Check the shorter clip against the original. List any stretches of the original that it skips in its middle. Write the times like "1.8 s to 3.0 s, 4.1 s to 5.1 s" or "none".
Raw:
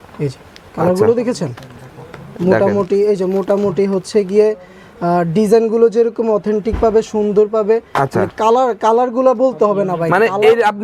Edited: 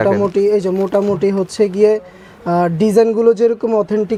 none